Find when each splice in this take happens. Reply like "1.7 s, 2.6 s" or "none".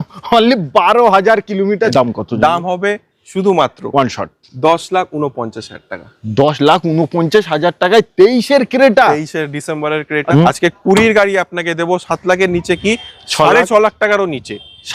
1.9 s, 10.3 s